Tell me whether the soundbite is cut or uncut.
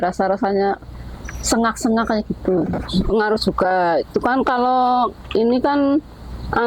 cut